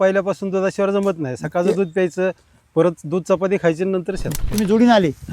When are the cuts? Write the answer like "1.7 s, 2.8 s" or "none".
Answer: 4.3 s